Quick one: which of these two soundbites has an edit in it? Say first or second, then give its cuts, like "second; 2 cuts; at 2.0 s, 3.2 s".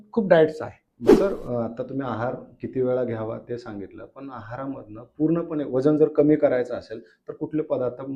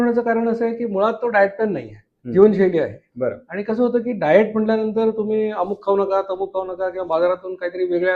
first; 1 cut; at 1.0 s